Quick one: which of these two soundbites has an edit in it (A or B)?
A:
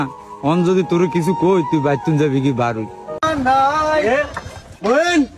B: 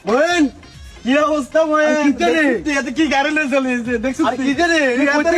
A